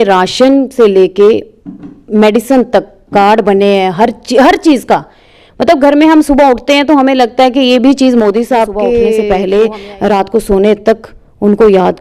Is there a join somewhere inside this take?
yes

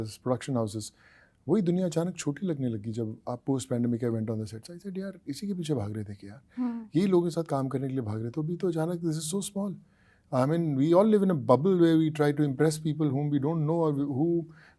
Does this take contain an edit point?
no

